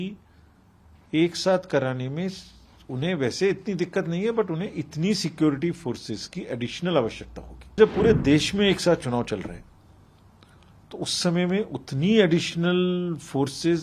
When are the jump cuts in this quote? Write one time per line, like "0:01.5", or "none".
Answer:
0:07.8